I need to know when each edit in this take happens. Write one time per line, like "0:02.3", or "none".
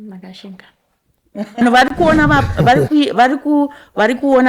0:01.6